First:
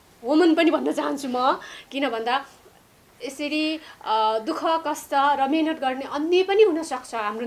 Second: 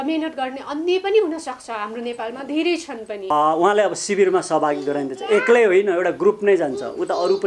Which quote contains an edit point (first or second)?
second